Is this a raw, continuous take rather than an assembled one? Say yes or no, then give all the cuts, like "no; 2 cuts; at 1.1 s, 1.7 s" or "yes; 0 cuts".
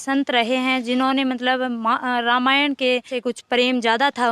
no; 1 cut; at 3.1 s